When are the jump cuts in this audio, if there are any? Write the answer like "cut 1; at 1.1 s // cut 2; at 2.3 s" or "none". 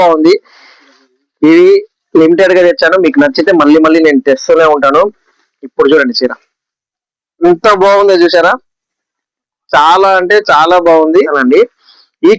cut 1; at 11.3 s

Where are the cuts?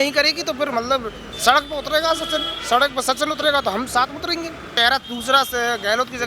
cut 1; at 4.7 s

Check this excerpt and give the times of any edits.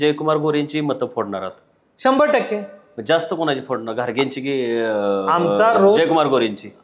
none

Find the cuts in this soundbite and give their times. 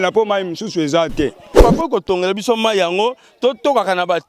cut 1; at 1.6 s

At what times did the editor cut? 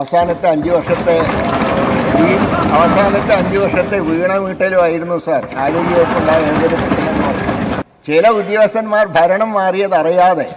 cut 1; at 7.8 s

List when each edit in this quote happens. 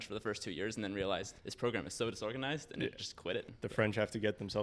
cut 1; at 1.4 s // cut 2; at 3.6 s

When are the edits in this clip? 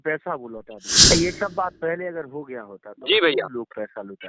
cut 1; at 1.1 s

